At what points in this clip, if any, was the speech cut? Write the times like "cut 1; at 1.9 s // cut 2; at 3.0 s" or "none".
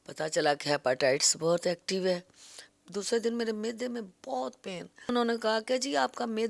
cut 1; at 2.8 s // cut 2; at 5.1 s